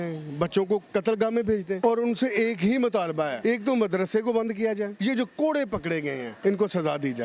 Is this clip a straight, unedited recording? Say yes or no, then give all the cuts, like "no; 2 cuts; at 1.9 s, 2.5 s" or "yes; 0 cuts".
no; 4 cuts; at 1.8 s, 3.3 s, 4.9 s, 6.3 s